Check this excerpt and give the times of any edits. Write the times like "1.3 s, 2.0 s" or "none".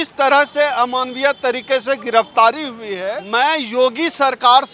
3.2 s